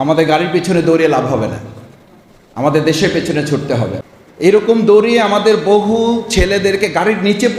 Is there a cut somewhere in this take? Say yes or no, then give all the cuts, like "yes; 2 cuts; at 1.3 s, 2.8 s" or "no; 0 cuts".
yes; 1 cut; at 4.0 s